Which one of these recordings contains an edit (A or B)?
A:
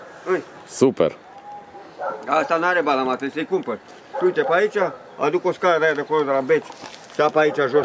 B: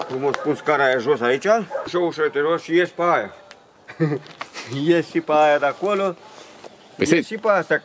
B